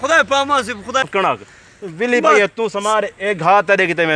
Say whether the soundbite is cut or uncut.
cut